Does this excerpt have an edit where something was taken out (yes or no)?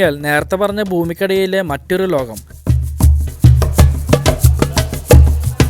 yes